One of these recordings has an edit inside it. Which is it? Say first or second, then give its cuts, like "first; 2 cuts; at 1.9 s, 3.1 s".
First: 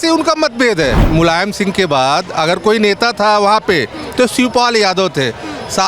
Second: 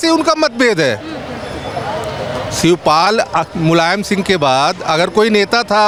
first; 1 cut; at 1.0 s